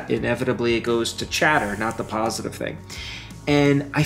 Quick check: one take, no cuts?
yes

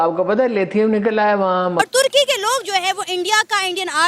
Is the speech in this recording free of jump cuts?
no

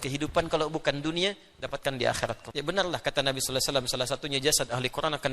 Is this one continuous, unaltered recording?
no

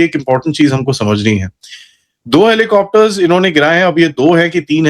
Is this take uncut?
yes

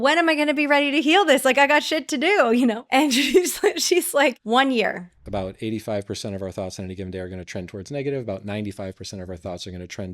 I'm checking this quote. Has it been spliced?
yes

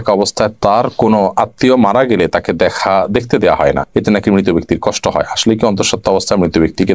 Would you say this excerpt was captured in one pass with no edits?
yes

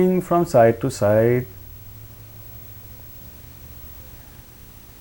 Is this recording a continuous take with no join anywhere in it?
yes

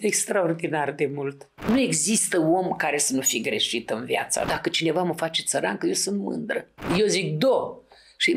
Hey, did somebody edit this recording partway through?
yes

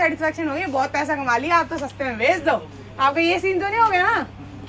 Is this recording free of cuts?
yes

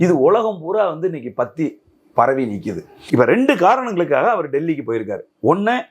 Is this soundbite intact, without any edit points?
no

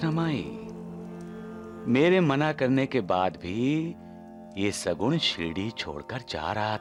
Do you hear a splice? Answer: no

